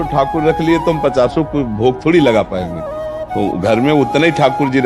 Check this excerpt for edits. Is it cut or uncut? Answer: uncut